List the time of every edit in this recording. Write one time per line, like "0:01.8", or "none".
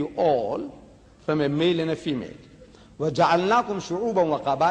0:03.1